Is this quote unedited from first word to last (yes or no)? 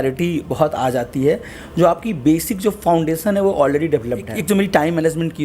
no